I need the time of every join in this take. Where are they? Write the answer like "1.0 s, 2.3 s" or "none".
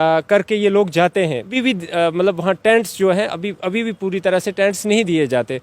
1.5 s